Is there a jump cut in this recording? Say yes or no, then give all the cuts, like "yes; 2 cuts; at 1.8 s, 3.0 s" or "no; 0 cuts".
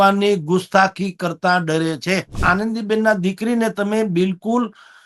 yes; 1 cut; at 2.4 s